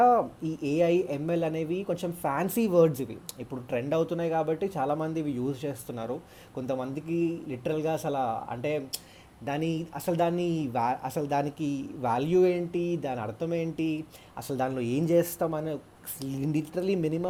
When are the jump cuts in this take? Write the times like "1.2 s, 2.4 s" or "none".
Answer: none